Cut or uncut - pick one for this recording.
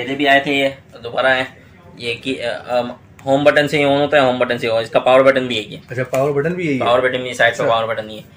uncut